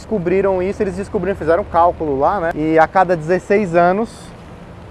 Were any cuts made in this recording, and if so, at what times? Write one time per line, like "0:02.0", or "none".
0:02.5